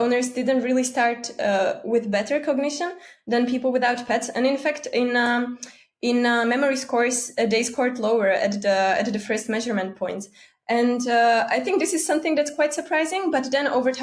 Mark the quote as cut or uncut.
uncut